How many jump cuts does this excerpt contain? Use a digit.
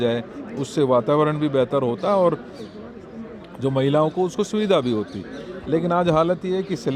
0